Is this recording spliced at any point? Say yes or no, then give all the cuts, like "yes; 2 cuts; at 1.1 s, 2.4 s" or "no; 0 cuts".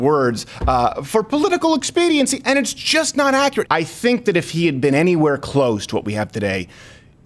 yes; 1 cut; at 3.6 s